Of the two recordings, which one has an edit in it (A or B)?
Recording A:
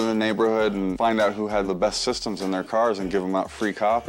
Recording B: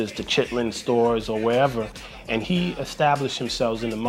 B